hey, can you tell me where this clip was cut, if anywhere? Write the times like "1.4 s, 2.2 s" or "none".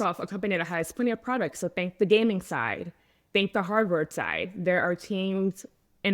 none

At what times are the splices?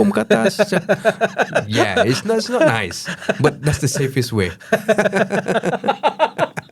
none

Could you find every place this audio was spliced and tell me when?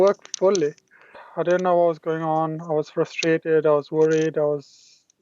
1.2 s

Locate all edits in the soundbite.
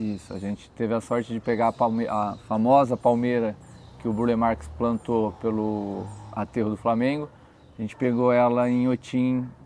none

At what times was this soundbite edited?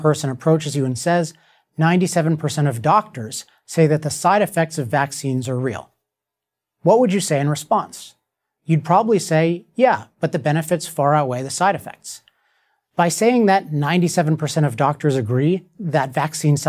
10.3 s

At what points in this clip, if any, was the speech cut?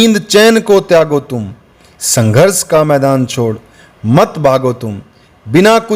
none

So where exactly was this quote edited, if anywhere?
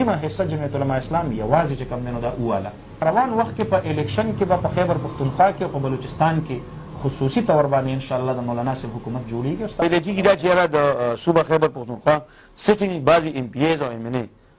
3.0 s, 9.8 s

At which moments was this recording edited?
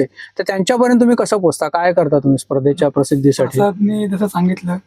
none

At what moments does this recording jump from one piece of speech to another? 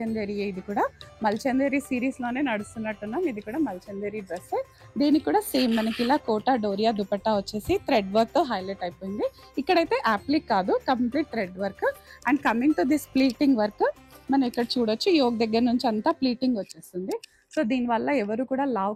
none

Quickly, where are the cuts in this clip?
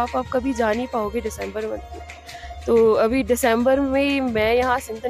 none

